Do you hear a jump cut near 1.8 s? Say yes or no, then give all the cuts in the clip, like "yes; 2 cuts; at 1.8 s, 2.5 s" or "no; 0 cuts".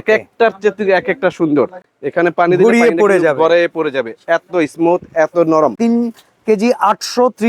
yes; 2 cuts; at 1.8 s, 5.8 s